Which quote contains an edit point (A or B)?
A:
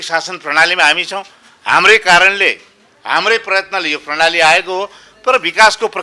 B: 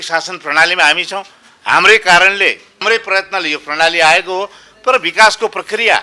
B